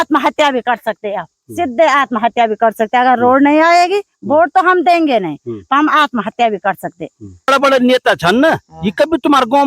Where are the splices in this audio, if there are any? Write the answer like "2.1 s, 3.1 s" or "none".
7.5 s